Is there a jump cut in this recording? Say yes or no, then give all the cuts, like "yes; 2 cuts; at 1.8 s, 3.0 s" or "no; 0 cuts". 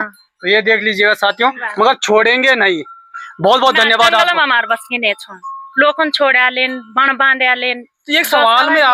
no; 0 cuts